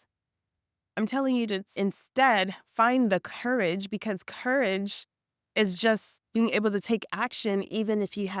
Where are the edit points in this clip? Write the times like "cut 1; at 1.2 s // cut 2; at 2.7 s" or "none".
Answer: cut 1; at 1.8 s